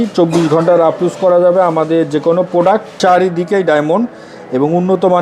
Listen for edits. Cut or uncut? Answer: cut